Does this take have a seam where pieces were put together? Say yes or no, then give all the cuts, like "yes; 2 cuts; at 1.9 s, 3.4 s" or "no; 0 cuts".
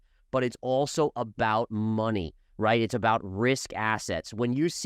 no; 0 cuts